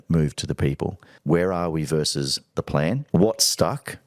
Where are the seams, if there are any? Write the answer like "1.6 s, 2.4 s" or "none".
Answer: 1.1 s, 3.0 s